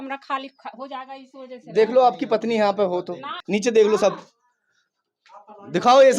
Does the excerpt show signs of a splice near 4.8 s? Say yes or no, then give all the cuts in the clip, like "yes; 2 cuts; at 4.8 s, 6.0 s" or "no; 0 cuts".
no; 1 cut; at 3.4 s